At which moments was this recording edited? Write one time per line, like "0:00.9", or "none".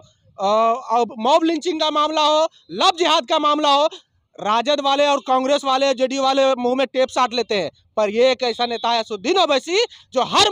none